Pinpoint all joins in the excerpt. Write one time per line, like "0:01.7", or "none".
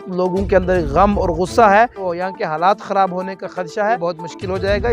0:02.0
0:04.0

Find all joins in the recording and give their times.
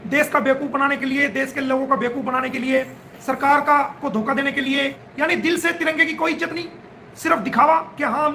0:05.0

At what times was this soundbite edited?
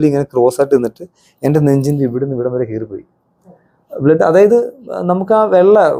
none

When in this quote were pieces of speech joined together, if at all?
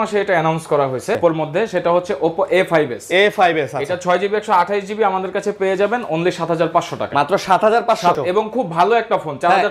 0:01.2
0:08.1

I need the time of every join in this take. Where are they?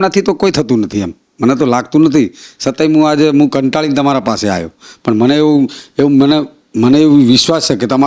none

